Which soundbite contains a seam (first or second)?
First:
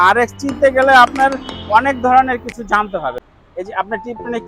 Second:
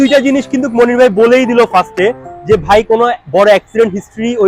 first